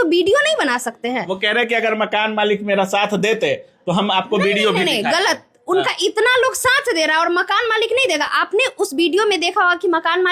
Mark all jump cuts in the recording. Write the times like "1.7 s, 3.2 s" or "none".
none